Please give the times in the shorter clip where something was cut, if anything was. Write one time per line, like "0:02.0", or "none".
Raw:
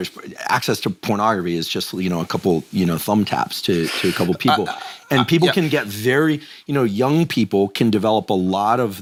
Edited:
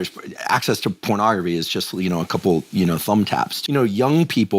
0:03.5